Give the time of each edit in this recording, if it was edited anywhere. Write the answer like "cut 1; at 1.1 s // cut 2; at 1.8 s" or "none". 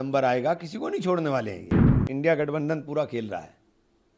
cut 1; at 2.0 s